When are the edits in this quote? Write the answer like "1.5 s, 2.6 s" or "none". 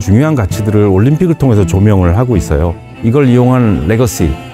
2.9 s